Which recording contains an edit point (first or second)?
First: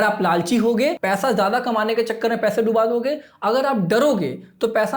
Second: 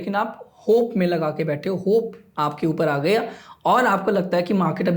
first